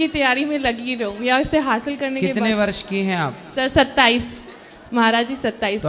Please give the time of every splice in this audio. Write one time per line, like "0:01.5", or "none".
none